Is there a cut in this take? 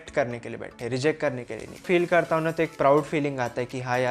yes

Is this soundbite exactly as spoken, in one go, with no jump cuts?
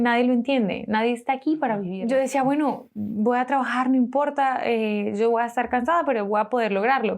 no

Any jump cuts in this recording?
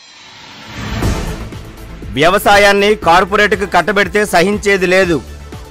no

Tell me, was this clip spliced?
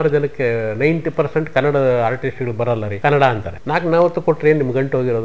yes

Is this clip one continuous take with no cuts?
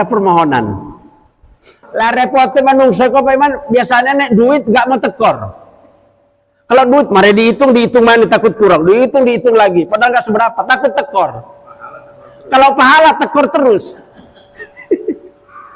no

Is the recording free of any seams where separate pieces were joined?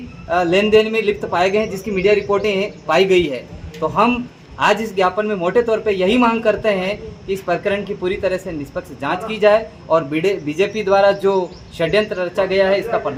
yes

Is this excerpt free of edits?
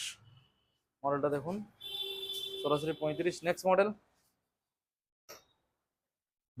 yes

